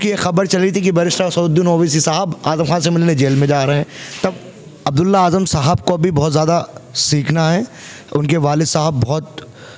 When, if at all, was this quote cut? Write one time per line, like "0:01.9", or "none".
0:04.3